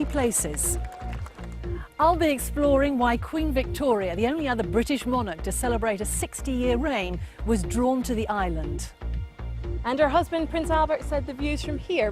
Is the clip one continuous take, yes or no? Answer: no